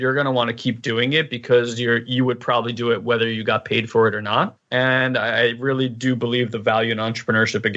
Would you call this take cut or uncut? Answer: uncut